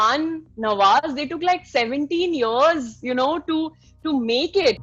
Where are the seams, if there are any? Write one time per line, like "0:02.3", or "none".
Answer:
none